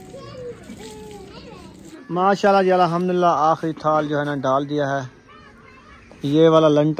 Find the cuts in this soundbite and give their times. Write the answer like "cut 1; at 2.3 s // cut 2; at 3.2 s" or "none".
cut 1; at 1.9 s